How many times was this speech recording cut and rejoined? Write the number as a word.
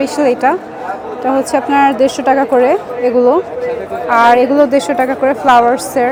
zero